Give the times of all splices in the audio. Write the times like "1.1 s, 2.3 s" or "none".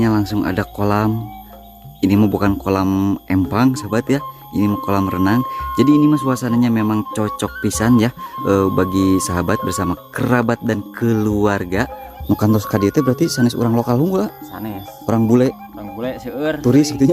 12.1 s